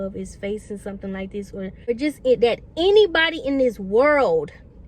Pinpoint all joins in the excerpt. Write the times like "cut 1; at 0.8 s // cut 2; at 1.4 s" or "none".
none